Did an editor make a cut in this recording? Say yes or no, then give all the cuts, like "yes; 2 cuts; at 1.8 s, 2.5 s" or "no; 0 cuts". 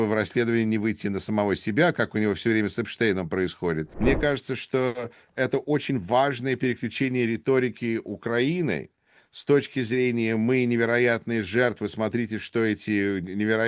yes; 1 cut; at 3.9 s